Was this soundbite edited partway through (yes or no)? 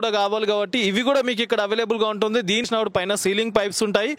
yes